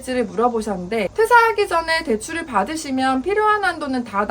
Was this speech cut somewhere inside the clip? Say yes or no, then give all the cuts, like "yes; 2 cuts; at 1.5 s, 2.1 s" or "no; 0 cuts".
yes; 1 cut; at 1.1 s